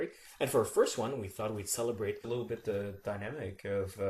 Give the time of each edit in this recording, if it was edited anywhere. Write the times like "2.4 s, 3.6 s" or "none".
none